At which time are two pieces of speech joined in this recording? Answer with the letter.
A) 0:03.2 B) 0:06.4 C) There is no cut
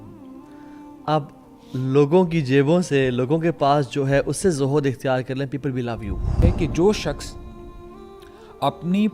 B